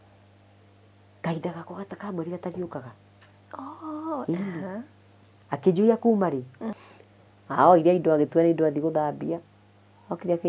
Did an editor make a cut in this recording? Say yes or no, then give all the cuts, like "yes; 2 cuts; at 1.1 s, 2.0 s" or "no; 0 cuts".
yes; 1 cut; at 6.5 s